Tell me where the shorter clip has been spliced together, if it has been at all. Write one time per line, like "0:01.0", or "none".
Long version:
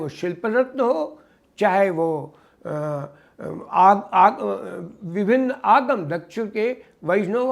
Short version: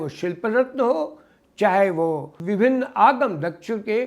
0:02.3